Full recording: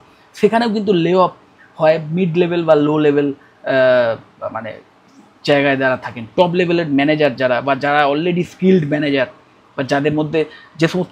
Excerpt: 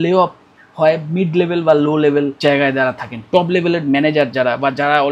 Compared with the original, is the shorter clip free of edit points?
no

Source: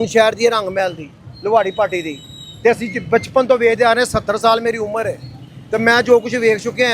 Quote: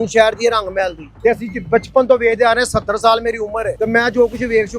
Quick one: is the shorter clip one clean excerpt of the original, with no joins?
no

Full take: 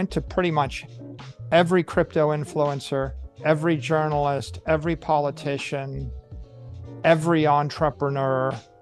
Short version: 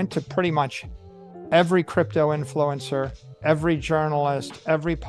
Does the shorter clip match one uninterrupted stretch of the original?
yes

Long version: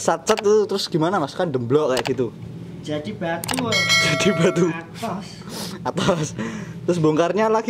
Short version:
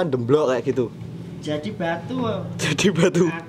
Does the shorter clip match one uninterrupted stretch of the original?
yes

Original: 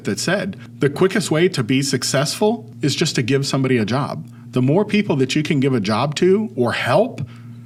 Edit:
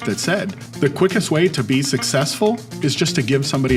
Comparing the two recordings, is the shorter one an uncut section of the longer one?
yes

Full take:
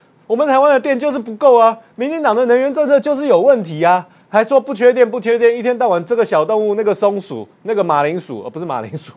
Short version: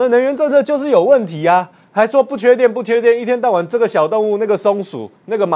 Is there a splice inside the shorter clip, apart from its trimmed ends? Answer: no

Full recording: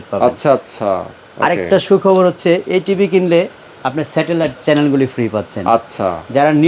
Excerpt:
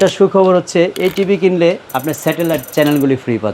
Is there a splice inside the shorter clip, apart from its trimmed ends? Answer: yes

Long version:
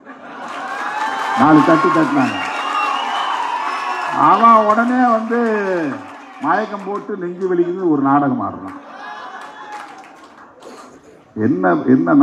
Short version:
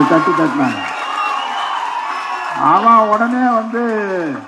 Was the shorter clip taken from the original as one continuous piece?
yes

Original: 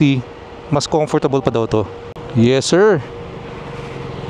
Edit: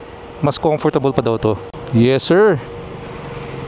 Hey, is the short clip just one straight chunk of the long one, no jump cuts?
no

